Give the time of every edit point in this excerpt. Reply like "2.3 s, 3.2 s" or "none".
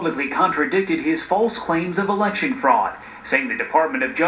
1.9 s